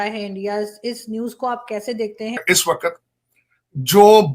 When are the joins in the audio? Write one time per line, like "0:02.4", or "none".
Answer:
0:02.4